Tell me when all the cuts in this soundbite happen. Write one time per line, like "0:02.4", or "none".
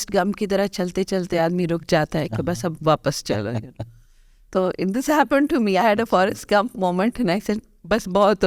none